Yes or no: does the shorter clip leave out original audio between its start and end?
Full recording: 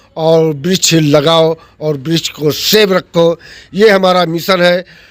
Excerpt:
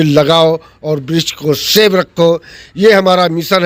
no